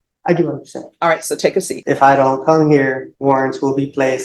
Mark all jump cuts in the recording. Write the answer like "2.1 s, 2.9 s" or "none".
1.8 s, 3.1 s